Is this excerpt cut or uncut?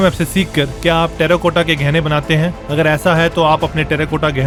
uncut